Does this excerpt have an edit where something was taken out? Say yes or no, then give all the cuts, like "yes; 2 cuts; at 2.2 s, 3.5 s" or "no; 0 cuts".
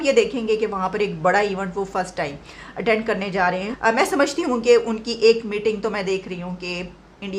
yes; 1 cut; at 3.7 s